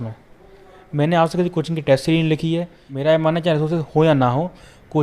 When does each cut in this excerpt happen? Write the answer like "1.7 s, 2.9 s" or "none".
2.8 s